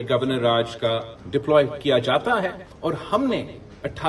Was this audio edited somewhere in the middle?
yes; 2 cuts; at 1.1 s, 2.7 s

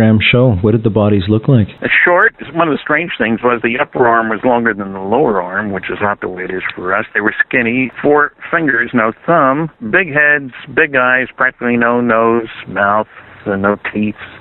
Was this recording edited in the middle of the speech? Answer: no; 0 cuts

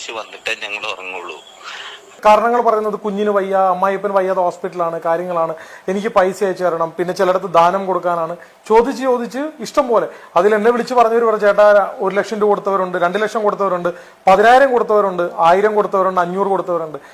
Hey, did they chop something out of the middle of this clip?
yes; 1 cut; at 2.2 s

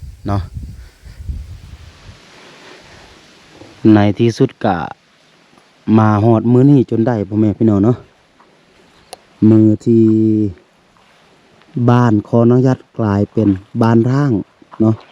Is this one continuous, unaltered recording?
no; 1 cut; at 1.7 s

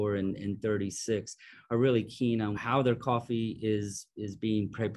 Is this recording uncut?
no; 1 cut; at 2.6 s

